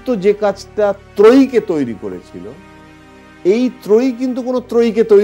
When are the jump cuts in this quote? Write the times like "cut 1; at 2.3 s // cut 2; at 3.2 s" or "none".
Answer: none